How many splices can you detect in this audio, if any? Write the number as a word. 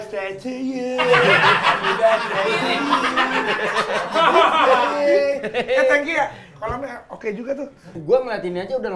one